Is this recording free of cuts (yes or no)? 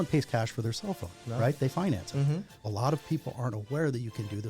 no